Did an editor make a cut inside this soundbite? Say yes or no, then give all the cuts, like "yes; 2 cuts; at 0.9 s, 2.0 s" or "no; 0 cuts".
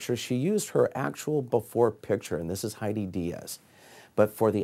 no; 0 cuts